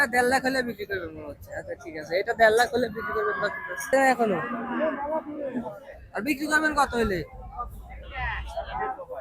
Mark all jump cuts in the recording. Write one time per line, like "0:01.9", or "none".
0:03.9